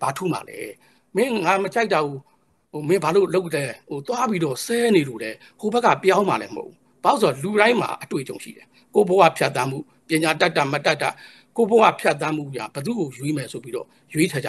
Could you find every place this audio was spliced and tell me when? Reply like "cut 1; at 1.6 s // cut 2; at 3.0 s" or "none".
cut 1; at 1.0 s